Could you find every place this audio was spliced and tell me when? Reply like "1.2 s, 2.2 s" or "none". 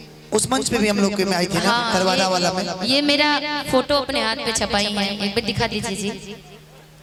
none